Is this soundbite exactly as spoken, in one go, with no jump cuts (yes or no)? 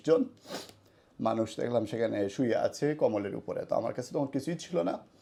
yes